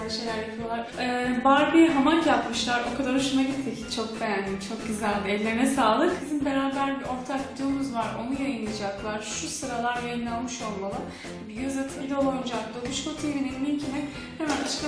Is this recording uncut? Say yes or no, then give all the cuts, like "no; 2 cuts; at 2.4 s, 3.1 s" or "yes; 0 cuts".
yes; 0 cuts